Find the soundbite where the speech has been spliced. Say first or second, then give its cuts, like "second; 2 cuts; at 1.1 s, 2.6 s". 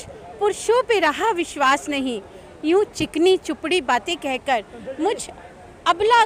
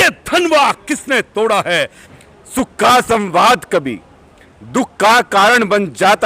second; 1 cut; at 2.0 s